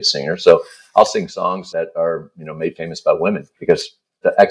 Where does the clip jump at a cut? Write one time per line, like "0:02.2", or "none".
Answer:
0:01.6
0:03.5